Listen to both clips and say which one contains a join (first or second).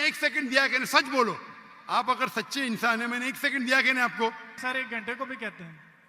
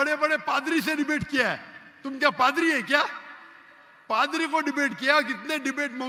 first